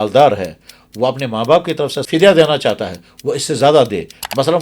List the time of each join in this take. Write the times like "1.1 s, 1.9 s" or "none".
2.0 s

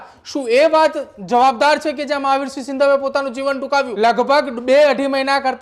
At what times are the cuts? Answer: 3.9 s

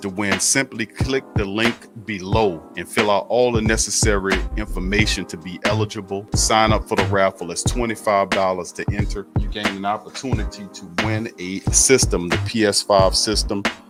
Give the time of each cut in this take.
none

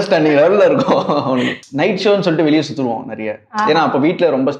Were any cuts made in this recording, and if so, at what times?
1.6 s

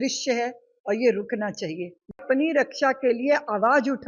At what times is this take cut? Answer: 2.2 s

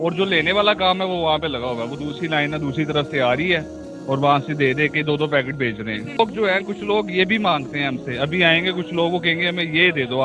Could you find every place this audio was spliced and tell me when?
6.2 s

